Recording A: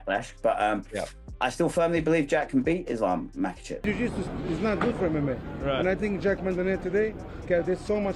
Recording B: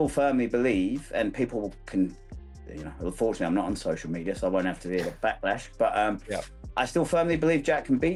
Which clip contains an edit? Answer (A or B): A